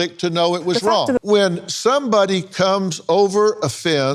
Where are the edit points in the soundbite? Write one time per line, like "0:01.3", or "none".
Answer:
0:01.2